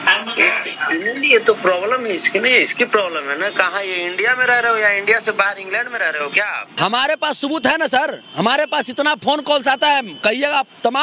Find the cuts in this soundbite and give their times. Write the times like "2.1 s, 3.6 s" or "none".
6.7 s